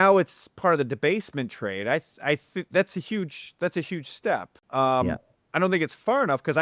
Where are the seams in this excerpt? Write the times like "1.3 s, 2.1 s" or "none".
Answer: 4.6 s

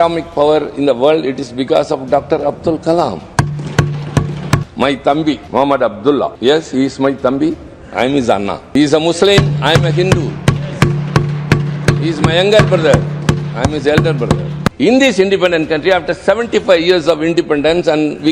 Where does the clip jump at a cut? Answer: 4.7 s, 5.4 s, 6.3 s, 8.6 s, 14.6 s

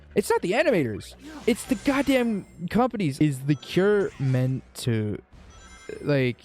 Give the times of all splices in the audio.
3.2 s

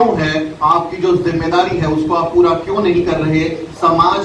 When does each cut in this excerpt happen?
none

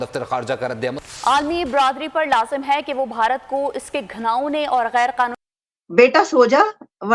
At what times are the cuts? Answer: 1.0 s, 5.4 s

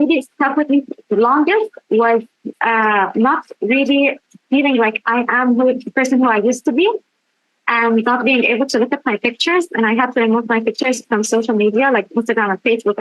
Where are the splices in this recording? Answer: 2.5 s

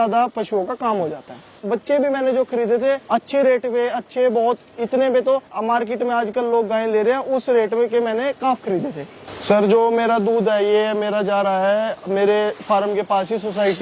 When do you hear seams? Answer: 1.6 s, 3.0 s, 5.5 s, 9.3 s

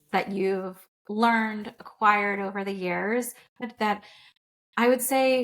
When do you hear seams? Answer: 3.6 s

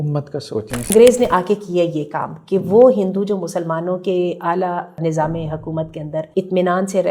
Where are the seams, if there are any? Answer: 0.9 s, 5.0 s, 6.3 s

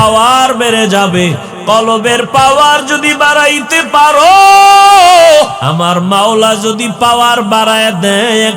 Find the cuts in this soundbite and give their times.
5.6 s

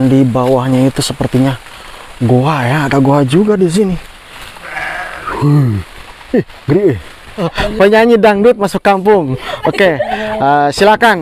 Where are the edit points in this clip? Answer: 7.5 s

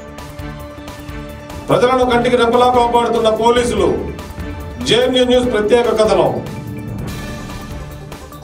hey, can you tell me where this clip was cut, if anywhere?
1.5 s

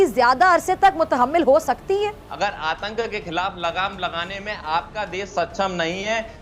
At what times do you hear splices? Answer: 2.3 s

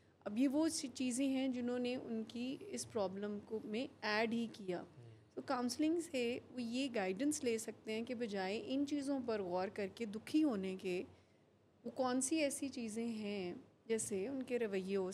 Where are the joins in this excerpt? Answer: none

